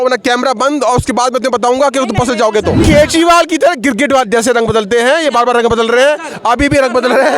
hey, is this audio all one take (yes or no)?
no